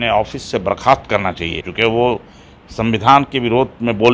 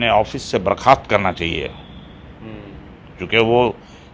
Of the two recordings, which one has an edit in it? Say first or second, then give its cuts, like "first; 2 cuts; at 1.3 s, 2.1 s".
first; 1 cut; at 1.6 s